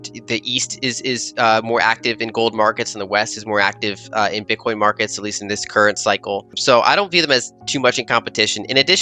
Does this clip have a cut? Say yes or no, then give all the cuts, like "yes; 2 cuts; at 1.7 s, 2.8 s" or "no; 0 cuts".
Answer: no; 0 cuts